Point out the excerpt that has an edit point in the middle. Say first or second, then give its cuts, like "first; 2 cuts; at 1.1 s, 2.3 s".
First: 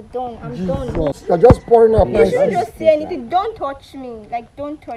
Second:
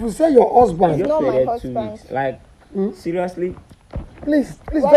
first; 1 cut; at 1.2 s